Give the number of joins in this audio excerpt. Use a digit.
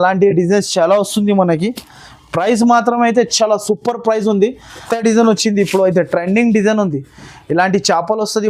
1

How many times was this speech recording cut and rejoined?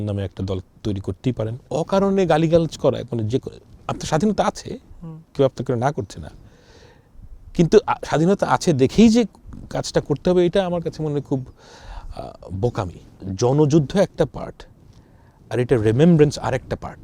2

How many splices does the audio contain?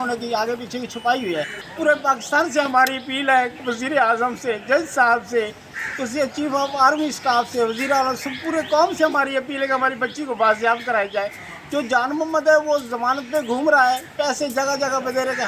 1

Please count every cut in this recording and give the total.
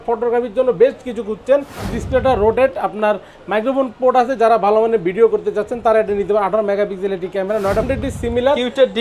2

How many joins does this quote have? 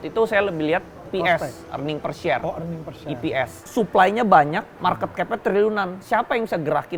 3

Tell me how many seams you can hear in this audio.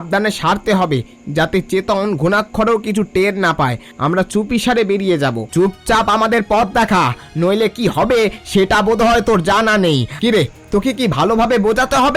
2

